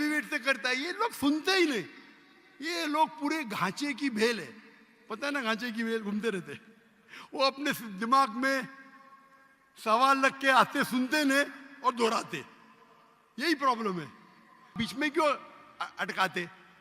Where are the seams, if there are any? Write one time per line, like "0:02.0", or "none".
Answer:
0:14.7